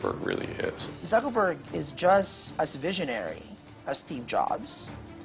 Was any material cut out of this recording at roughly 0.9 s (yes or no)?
yes